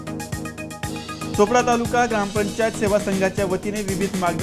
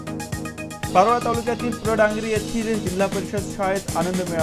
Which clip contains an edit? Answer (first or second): first